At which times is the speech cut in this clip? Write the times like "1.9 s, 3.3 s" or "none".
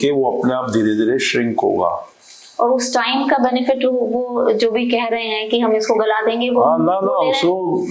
none